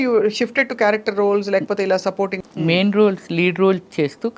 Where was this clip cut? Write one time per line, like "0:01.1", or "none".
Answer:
0:02.4